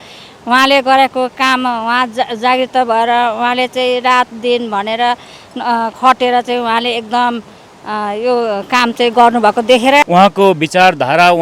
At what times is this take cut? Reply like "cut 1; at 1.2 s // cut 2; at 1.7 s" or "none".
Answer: cut 1; at 10.0 s